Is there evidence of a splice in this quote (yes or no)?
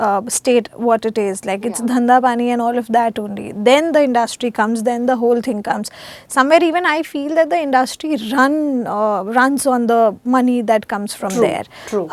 no